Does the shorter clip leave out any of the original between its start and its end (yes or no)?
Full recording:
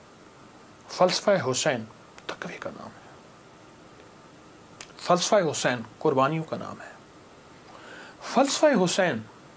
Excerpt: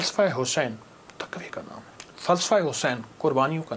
yes